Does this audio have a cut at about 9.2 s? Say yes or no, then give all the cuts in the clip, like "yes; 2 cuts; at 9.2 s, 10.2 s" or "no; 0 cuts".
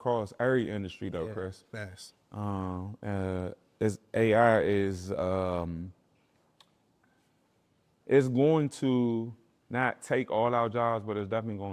no; 0 cuts